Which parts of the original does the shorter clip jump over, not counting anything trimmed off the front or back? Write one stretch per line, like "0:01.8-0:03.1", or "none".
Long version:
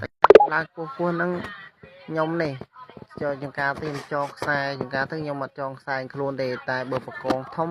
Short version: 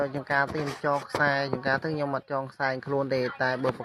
none